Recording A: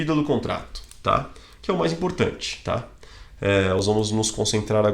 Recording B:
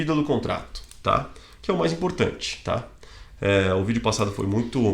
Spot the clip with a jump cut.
A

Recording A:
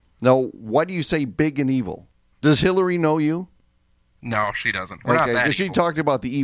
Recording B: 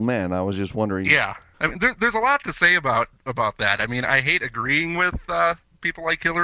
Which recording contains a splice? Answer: B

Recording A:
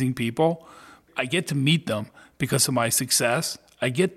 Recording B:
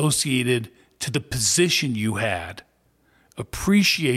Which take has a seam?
A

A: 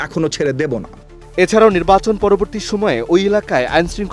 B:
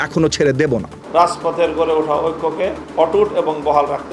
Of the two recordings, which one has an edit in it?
B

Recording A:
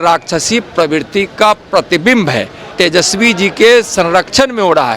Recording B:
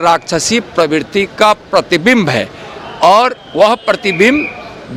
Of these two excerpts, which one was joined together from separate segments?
A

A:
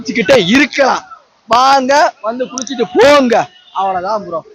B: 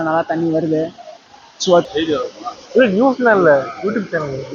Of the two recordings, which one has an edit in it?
B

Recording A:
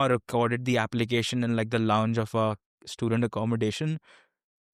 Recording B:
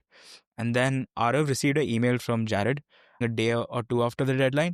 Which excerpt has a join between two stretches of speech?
B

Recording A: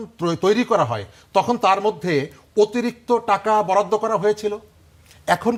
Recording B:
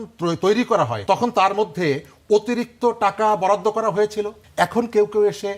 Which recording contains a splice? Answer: B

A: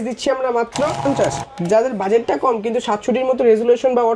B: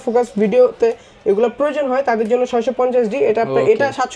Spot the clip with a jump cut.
A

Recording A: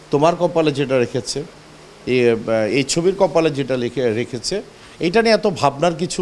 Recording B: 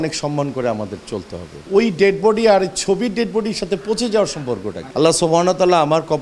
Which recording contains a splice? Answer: B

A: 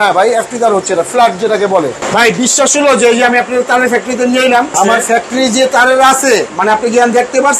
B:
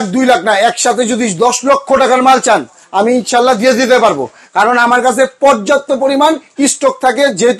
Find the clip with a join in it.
A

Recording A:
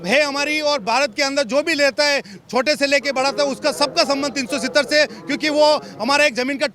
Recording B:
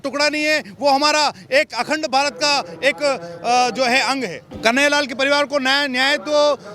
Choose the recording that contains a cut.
B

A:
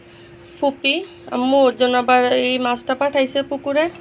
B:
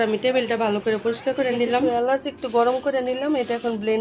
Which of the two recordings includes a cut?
B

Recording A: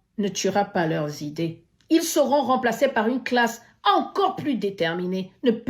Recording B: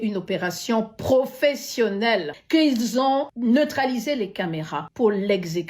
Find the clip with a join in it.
B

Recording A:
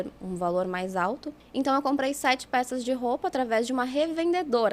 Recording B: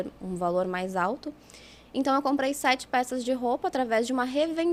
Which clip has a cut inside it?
A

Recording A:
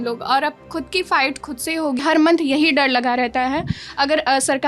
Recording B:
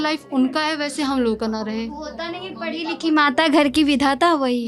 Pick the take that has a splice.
A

